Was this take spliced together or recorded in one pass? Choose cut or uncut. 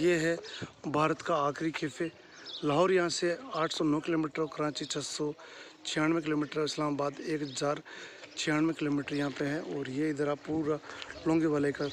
uncut